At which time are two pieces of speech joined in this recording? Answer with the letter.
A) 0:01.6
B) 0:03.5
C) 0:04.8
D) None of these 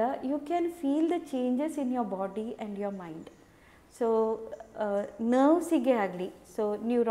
D